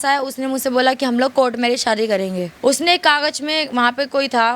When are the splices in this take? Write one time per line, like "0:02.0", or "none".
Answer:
0:02.5